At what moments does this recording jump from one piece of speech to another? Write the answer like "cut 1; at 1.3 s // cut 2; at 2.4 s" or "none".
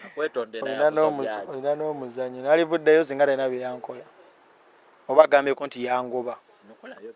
none

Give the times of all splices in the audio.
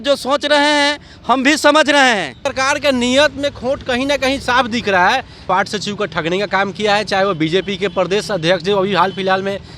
cut 1; at 2.4 s // cut 2; at 5.5 s

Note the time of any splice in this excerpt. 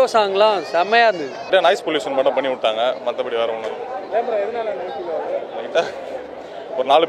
cut 1; at 1.5 s

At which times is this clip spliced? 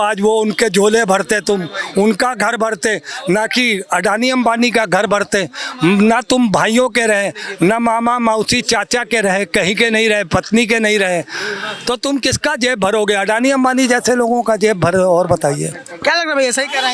none

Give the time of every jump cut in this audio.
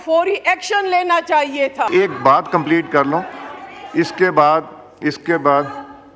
cut 1; at 1.9 s

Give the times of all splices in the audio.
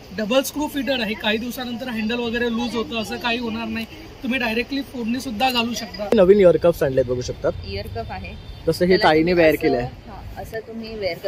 cut 1; at 6.1 s

